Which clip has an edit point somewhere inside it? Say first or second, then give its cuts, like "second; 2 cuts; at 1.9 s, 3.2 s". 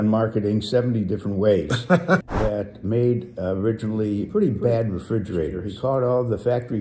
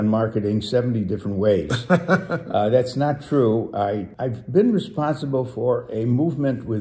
first; 2 cuts; at 2.2 s, 5.6 s